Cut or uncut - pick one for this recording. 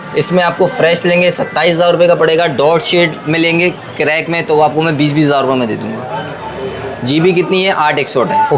uncut